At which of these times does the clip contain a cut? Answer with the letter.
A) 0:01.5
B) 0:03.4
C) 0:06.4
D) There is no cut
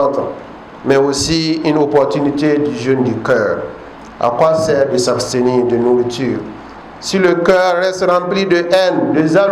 D